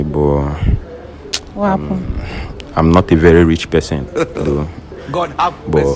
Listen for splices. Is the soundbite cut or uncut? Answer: uncut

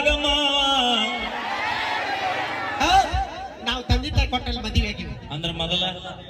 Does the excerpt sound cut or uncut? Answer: uncut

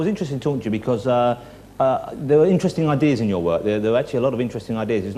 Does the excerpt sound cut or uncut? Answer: cut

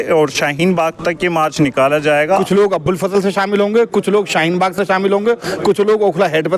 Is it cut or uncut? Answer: cut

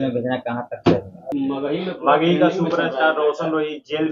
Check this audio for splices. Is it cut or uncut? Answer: cut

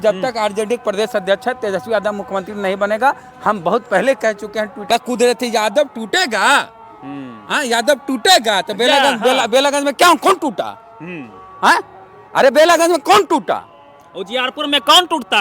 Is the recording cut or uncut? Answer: cut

